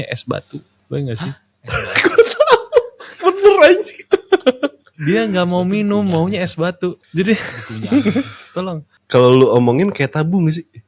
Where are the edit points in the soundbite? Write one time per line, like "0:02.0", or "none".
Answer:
0:04.9
0:09.0